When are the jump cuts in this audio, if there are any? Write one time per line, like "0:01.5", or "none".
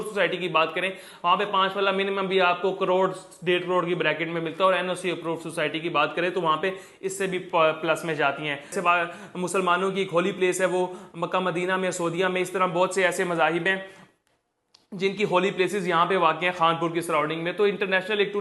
0:08.7